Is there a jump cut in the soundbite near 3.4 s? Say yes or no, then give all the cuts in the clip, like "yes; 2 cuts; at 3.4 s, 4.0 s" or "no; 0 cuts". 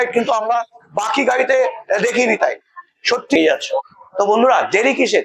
yes; 1 cut; at 3.4 s